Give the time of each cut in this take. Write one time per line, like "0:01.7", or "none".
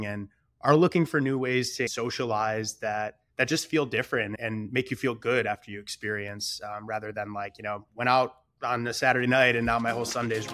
0:01.9
0:03.2
0:04.4